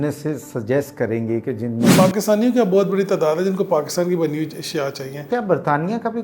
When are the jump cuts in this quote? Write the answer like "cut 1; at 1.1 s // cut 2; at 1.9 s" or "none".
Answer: cut 1; at 1.9 s // cut 2; at 5.2 s